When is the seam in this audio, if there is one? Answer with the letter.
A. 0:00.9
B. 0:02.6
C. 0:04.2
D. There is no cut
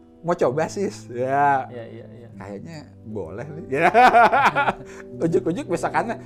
D